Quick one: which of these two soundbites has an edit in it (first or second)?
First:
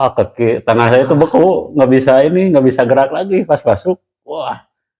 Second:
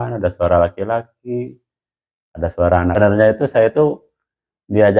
second